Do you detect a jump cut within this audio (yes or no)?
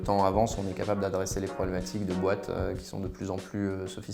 no